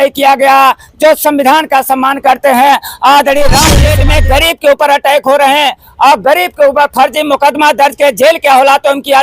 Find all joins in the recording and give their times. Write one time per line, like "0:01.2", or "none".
0:03.9